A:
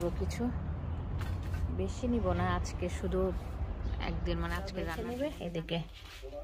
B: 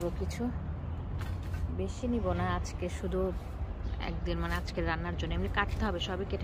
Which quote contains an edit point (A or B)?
A